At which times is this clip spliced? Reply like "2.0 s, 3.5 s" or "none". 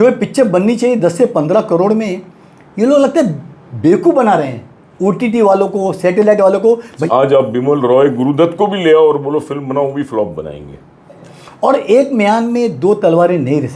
7.0 s, 11.2 s